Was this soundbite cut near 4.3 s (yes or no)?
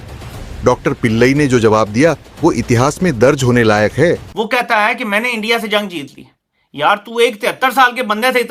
yes